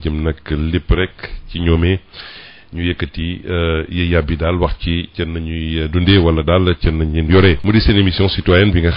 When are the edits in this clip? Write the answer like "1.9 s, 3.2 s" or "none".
7.6 s